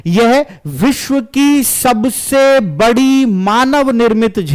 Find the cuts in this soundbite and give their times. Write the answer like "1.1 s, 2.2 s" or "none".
none